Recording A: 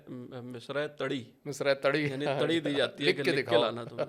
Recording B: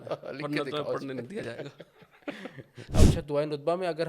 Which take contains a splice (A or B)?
B